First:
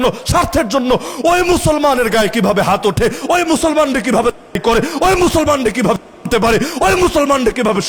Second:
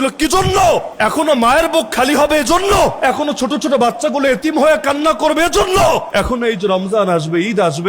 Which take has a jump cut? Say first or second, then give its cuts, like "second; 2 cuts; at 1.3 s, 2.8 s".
second; 3 cuts; at 0.9 s, 3.0 s, 6.1 s